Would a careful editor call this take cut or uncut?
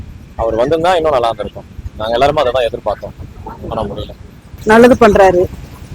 cut